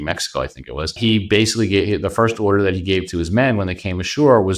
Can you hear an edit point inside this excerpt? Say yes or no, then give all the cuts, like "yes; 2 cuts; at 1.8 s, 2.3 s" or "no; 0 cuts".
yes; 1 cut; at 1.0 s